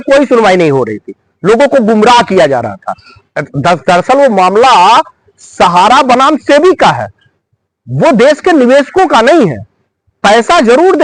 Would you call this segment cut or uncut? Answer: uncut